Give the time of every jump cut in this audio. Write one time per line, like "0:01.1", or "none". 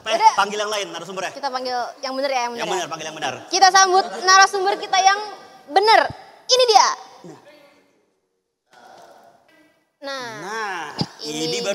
none